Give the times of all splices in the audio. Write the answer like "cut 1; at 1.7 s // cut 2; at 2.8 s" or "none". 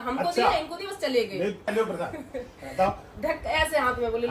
cut 1; at 1.6 s